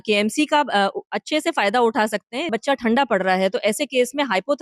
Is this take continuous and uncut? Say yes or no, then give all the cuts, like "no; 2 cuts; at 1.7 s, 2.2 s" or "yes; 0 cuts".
no; 1 cut; at 2.5 s